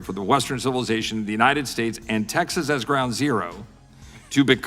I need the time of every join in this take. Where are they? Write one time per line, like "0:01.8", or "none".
none